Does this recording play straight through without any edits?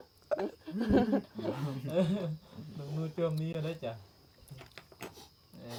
yes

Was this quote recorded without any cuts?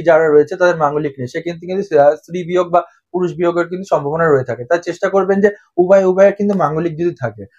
yes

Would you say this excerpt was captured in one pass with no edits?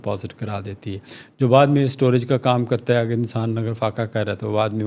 yes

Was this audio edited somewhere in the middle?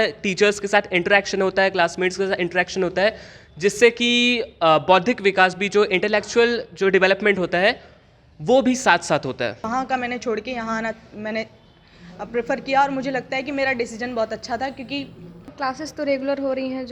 yes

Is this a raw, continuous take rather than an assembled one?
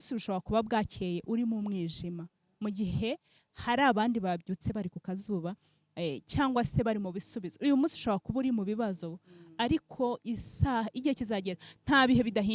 yes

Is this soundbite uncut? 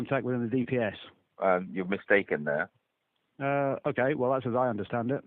yes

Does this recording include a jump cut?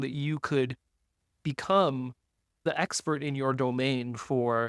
yes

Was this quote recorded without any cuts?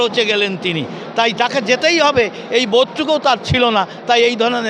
yes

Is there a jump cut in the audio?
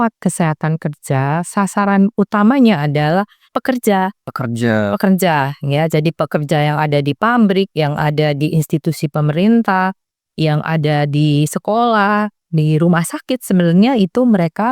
no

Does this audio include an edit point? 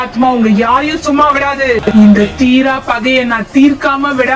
yes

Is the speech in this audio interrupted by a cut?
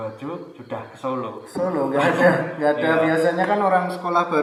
no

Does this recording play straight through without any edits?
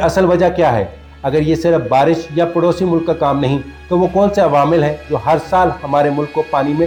yes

